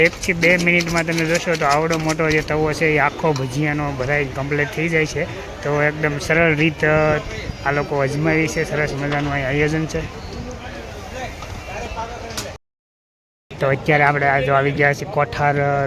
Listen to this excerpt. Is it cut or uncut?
uncut